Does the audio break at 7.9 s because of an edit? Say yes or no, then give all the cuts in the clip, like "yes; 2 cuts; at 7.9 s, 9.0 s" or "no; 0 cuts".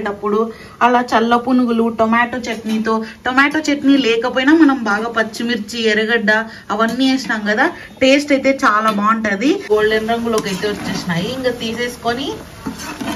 no; 1 cut; at 9.6 s